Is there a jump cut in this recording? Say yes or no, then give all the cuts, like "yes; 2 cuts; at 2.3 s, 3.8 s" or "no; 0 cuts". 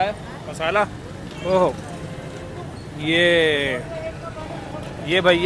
no; 0 cuts